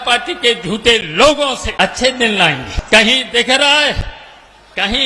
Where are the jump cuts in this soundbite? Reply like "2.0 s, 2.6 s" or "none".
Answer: 1.7 s, 2.7 s